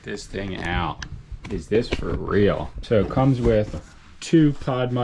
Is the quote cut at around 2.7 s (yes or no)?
yes